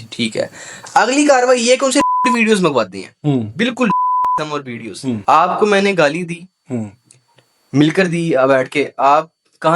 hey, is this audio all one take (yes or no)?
no